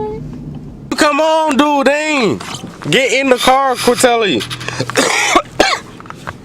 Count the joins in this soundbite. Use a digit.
1